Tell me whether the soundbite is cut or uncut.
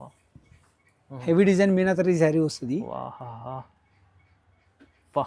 uncut